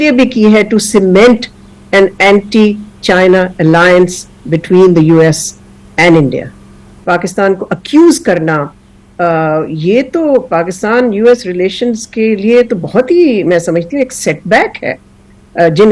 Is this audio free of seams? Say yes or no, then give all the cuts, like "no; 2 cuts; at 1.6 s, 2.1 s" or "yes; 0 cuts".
no; 1 cut; at 6.9 s